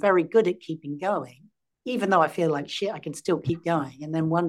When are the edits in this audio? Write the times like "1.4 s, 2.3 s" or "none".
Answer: none